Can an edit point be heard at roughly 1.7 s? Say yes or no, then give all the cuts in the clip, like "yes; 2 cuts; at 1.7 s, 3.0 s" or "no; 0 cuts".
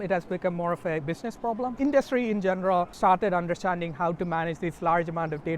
yes; 2 cuts; at 1.7 s, 2.9 s